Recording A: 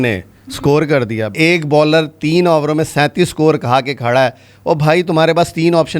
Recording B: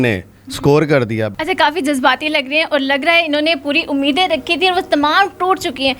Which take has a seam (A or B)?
A